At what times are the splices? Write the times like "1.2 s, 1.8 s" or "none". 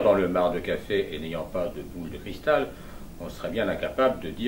none